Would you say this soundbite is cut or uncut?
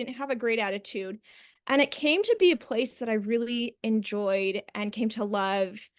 uncut